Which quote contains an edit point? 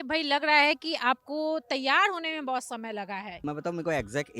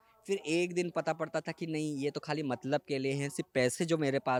first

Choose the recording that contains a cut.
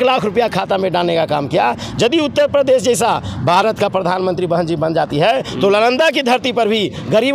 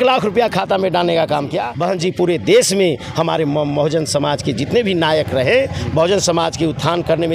second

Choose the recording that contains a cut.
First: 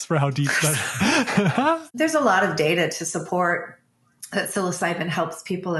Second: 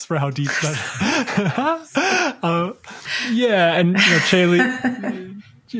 first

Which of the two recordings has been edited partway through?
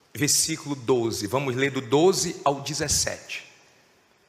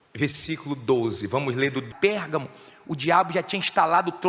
first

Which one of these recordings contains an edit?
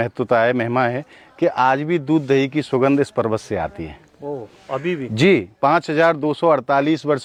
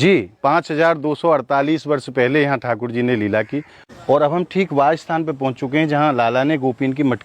second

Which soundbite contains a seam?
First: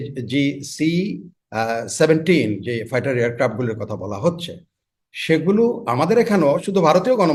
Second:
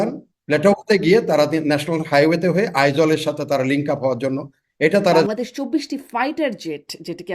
second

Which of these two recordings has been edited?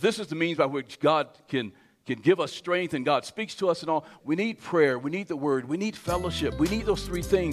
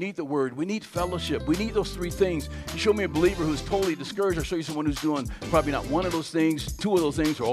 first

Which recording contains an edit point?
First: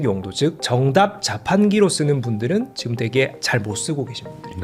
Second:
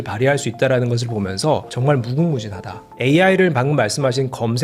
second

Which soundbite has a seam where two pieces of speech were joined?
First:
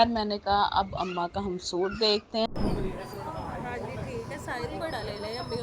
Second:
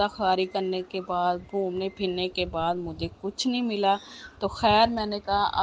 first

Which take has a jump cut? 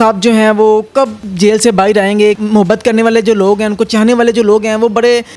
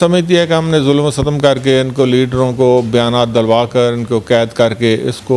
first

